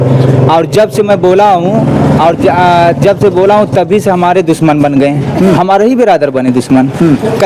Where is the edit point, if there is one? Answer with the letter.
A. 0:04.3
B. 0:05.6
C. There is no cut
C